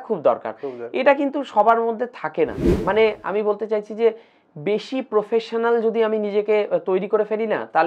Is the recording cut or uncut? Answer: cut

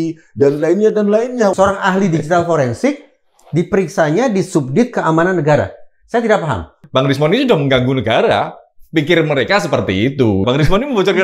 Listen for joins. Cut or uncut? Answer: cut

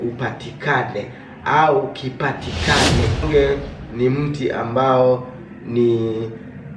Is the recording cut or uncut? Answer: cut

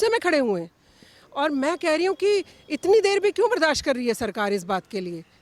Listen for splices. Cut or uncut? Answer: uncut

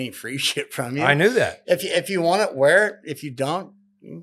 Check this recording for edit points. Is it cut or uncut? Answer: cut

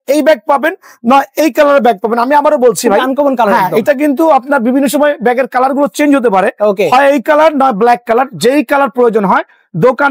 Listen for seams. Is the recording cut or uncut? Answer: uncut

